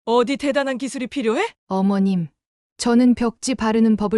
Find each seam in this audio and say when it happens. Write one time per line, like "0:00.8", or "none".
0:01.6